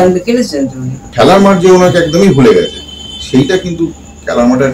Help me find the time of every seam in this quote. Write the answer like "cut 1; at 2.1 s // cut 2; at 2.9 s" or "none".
cut 1; at 1.0 s